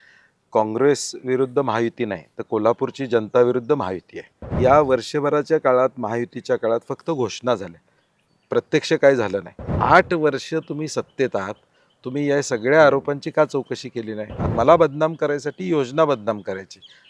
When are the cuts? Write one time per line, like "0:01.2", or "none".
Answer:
0:04.6
0:09.7
0:14.4

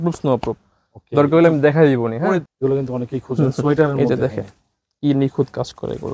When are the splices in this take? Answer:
0:02.5

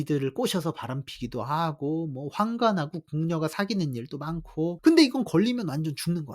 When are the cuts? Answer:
0:04.8

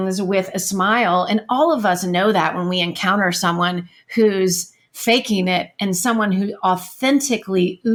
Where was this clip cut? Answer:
none

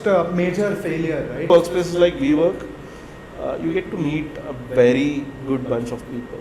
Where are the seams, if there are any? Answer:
0:01.5

